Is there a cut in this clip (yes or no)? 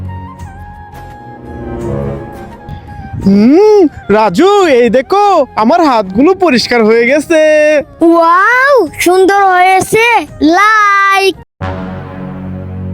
yes